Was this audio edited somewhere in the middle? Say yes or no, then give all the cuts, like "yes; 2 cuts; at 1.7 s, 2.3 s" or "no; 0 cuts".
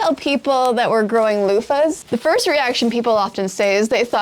yes; 1 cut; at 2.0 s